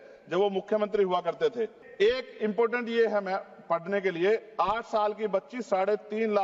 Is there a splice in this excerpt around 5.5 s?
no; 1 cut; at 1.8 s

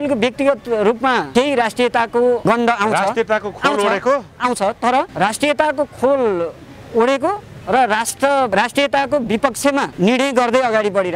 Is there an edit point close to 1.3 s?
yes; 5 cuts; at 1.3 s, 2.4 s, 5.1 s, 8.5 s, 9.9 s

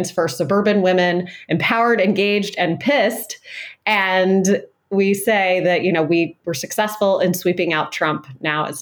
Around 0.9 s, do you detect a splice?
no; 1 cut; at 6.4 s

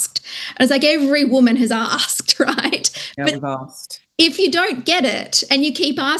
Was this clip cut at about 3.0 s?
no; 0 cuts

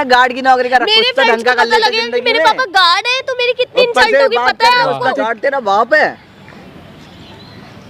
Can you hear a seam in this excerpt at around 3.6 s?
no; 1 cut; at 5.1 s

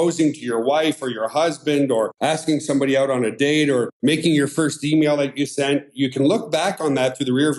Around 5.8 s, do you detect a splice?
no; 2 cuts; at 2.1 s, 3.9 s

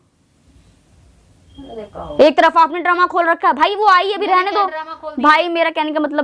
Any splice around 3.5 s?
no; 0 cuts

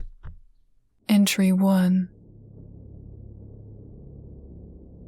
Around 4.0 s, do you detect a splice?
no; 1 cut; at 2.1 s

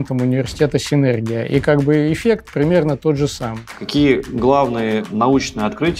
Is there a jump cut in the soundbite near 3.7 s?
yes; 2 cuts; at 3.7 s, 5.1 s

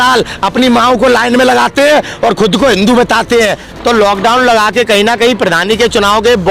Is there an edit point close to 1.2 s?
no; 1 cut; at 3.6 s

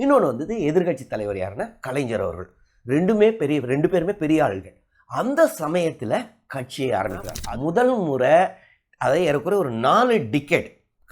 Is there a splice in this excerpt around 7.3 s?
yes; 1 cut; at 7.3 s

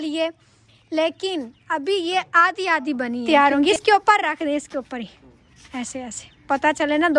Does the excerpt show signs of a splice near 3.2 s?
yes; 1 cut; at 3.2 s

